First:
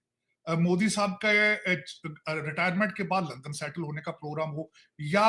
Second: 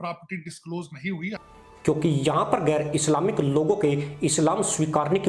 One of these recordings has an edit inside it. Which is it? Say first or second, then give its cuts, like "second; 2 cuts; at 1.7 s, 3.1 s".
second; 1 cut; at 1.5 s